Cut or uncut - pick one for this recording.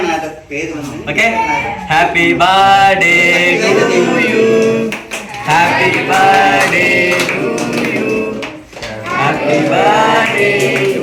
uncut